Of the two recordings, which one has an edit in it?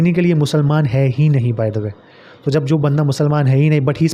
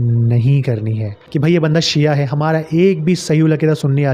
second; 1 cut; at 1.3 s

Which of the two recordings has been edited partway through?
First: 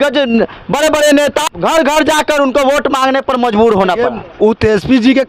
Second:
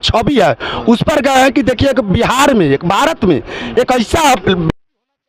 first; 1 cut; at 1.5 s

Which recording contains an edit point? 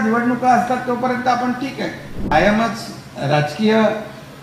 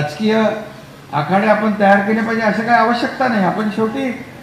first; 1 cut; at 2.2 s

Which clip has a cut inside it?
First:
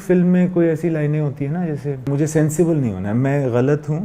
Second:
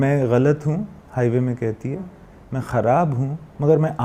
first; 1 cut; at 2.1 s

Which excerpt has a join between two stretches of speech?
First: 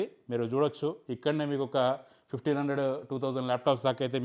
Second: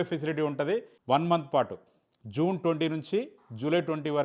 second; 1 cut; at 0.9 s

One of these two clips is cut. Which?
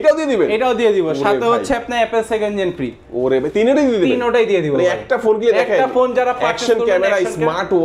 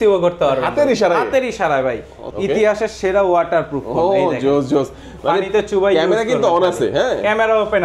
second; 1 cut; at 2.2 s

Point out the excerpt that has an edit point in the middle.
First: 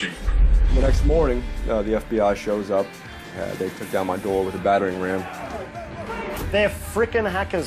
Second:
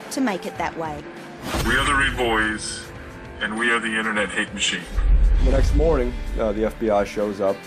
second; 1 cut; at 3.3 s

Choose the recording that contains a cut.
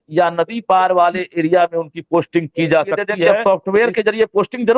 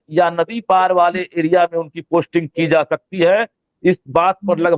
first; 1 cut; at 3.4 s

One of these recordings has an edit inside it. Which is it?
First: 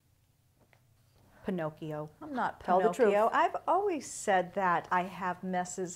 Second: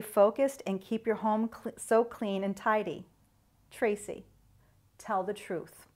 first; 1 cut; at 3.1 s

